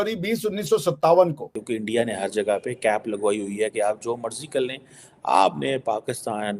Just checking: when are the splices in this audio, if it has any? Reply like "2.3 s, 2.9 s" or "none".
1.6 s